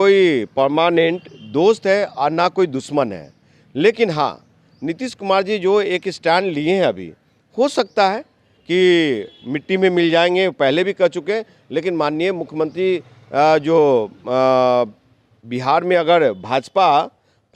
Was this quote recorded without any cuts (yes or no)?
yes